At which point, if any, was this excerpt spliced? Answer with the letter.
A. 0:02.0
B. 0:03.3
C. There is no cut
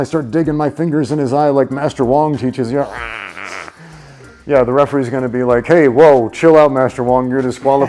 C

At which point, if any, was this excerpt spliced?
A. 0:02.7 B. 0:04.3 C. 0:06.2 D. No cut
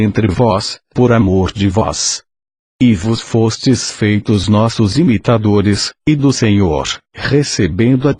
D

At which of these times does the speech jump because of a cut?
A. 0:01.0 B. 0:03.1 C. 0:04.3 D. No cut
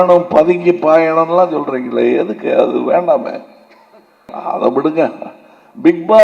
C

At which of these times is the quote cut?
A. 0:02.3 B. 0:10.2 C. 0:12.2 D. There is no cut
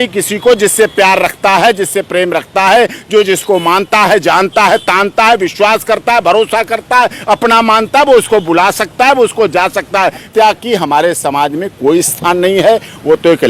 B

